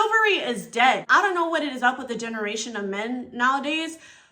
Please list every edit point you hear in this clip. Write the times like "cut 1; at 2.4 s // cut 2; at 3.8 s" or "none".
cut 1; at 1.0 s